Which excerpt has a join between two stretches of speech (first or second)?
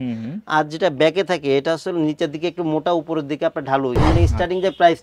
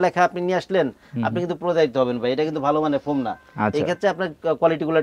first